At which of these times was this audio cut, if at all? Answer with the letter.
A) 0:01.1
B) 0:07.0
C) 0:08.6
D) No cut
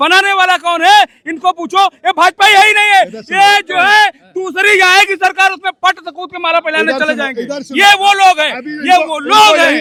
D